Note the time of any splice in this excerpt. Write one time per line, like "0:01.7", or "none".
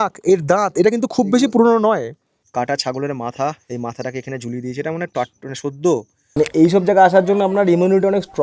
0:02.4
0:06.2

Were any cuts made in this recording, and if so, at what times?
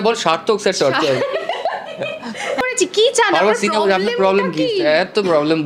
0:02.7

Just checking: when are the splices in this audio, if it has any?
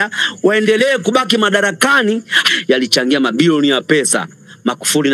0:02.4

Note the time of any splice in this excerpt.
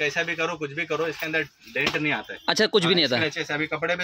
none

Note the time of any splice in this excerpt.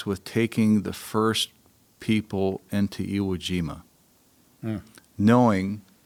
none

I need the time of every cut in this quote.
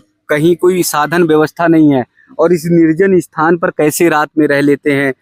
none

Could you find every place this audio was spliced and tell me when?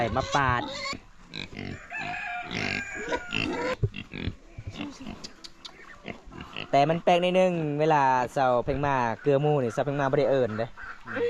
0:01.1
0:03.7

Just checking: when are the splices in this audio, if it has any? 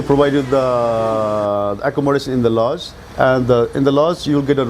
none

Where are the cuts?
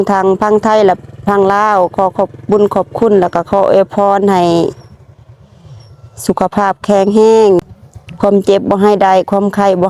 0:07.6

